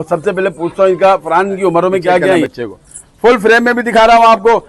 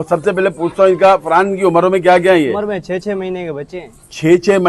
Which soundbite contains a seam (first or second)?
first